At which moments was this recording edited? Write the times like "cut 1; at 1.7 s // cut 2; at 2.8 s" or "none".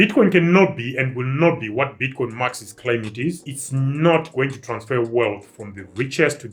none